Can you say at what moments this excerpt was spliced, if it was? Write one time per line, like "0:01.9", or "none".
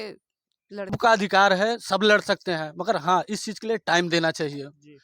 0:01.0

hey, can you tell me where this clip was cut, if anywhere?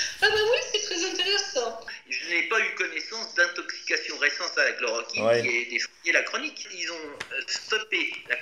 0:01.8
0:06.7

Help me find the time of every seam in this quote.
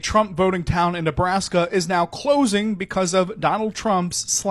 none

